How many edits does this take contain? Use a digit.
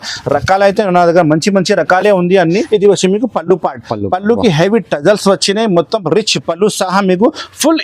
1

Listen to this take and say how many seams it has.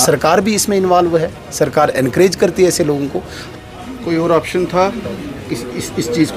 1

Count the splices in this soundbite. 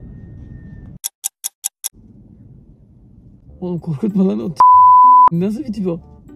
1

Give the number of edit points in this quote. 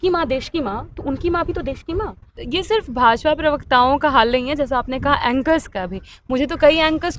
1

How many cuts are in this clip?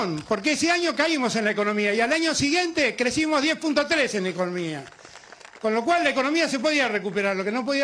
0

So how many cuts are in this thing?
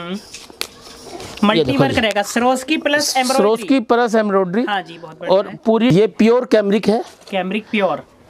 1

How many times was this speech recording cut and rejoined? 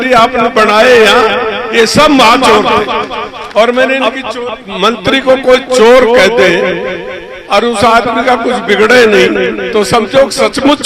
1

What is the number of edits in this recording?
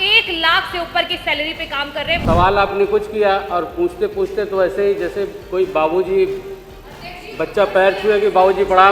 1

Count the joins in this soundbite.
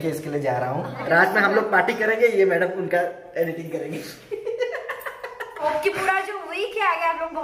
2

